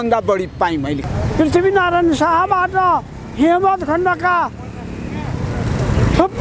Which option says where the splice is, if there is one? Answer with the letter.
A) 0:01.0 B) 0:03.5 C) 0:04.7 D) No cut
A